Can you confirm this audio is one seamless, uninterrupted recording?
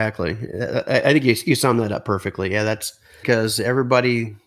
no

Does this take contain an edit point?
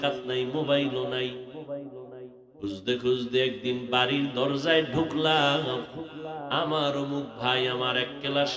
yes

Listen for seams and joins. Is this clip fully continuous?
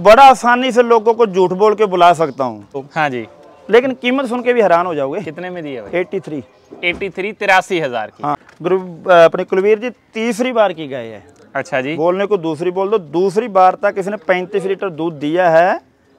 no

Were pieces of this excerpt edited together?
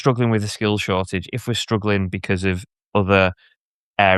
no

